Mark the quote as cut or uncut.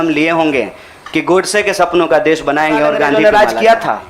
cut